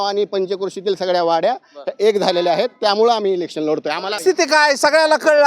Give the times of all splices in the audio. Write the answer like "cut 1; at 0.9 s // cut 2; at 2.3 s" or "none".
cut 1; at 4.2 s